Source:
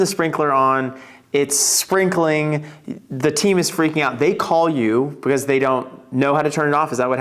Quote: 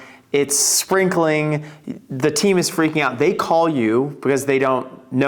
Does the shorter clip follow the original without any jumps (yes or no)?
yes